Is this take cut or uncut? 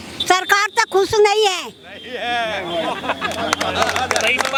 uncut